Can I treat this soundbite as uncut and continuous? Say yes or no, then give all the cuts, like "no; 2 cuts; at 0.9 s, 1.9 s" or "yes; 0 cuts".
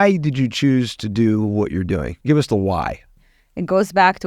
no; 2 cuts; at 2.1 s, 3.2 s